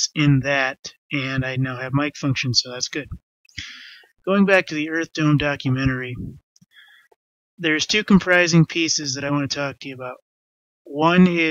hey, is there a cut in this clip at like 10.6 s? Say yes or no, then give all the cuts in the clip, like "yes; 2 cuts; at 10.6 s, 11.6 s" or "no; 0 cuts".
yes; 1 cut; at 10.6 s